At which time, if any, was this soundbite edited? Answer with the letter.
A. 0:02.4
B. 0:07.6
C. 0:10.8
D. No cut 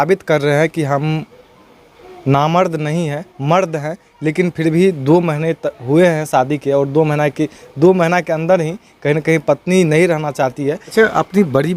C